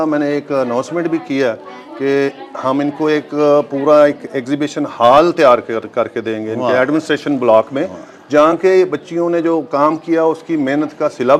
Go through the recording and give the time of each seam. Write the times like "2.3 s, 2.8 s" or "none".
none